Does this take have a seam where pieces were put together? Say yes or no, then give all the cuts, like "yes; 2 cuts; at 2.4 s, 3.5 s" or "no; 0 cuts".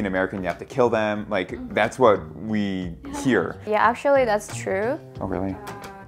no; 0 cuts